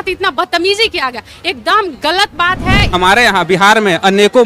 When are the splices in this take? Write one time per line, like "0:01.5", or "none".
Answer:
0:02.9